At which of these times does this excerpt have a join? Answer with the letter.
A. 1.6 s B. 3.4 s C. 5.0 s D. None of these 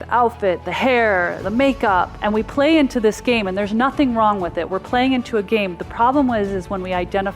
A